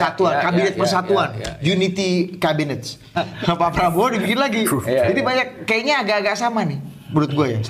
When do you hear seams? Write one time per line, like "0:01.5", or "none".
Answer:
0:03.1